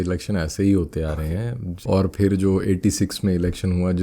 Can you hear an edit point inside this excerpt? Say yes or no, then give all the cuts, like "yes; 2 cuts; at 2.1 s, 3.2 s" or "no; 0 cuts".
yes; 1 cut; at 1.6 s